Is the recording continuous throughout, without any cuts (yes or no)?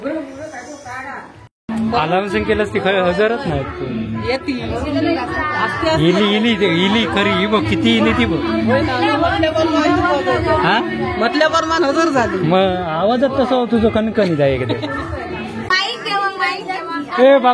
no